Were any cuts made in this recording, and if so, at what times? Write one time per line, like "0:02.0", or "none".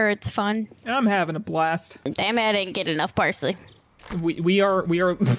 0:01.9